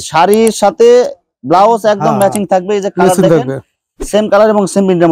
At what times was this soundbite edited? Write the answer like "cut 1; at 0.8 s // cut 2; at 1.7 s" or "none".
none